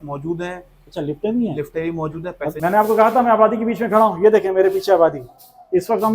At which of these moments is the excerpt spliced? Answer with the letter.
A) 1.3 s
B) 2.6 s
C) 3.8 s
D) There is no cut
B